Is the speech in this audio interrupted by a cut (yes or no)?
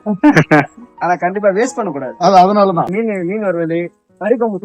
yes